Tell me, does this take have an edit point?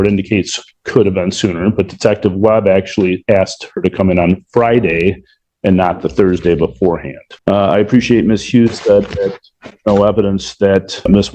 no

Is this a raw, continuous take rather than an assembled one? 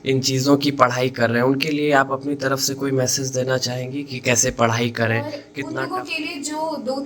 no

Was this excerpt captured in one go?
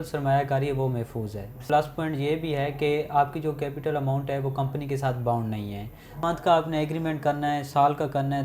no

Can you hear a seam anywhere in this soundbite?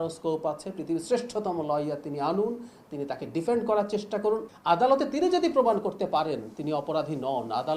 yes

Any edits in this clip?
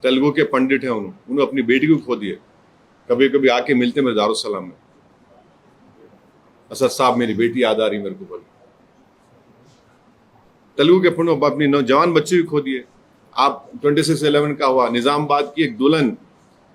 no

